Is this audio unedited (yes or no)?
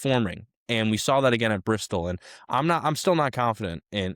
yes